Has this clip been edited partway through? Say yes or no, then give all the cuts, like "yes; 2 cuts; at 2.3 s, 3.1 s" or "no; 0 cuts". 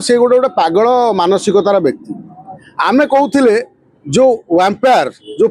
no; 0 cuts